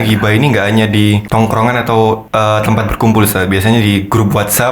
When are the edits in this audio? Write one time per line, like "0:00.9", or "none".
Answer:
0:01.2
0:02.2